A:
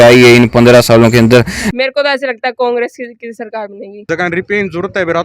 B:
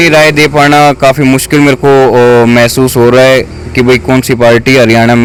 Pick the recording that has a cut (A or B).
A